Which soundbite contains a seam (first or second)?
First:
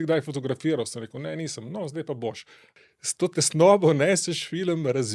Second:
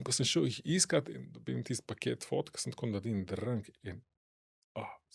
first